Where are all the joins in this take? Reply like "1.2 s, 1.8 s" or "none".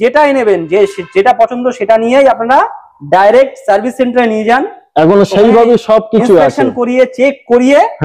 none